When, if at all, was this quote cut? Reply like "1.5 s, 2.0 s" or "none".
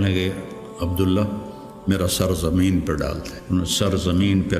3.3 s